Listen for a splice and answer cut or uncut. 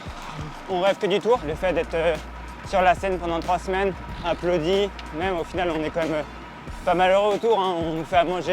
cut